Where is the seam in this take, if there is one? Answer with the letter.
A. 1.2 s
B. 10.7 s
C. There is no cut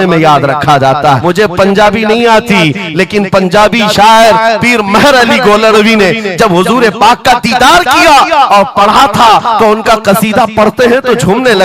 A